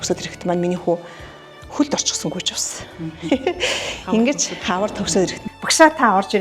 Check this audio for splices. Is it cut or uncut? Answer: cut